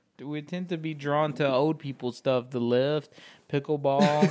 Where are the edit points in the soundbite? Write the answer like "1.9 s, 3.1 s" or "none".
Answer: none